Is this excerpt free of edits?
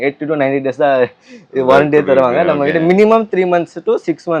yes; 0 cuts

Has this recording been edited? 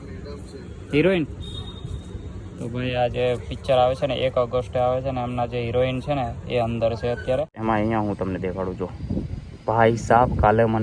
yes; 1 cut; at 7.6 s

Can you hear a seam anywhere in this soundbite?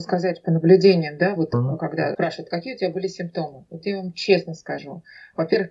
yes; 1 cut; at 2.1 s

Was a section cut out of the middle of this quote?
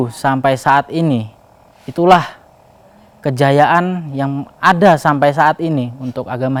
no; 0 cuts

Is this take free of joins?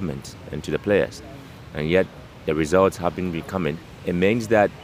no; 1 cut; at 3.9 s

